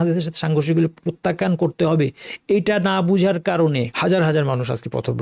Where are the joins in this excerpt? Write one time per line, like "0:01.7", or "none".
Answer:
0:03.9